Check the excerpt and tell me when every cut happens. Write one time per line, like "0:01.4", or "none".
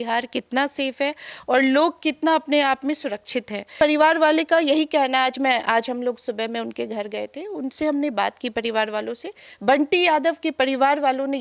0:03.8